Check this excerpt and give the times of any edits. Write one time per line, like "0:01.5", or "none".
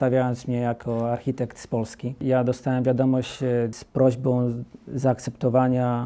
0:02.2
0:03.8